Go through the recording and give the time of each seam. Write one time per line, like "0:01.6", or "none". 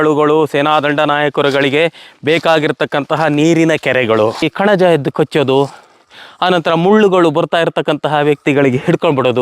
0:04.5